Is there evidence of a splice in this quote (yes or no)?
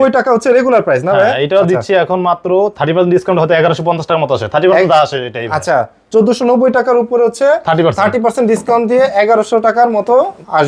no